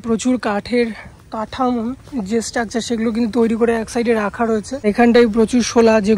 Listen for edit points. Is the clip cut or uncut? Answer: cut